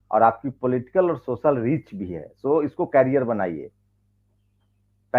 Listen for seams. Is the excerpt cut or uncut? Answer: uncut